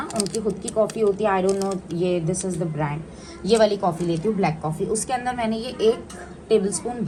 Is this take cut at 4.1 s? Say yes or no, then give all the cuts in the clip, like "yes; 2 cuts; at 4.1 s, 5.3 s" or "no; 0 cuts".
no; 0 cuts